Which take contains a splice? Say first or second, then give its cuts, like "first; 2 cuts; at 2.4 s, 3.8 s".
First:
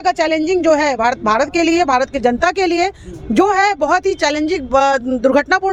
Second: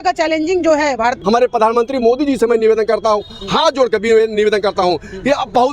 second; 1 cut; at 1.2 s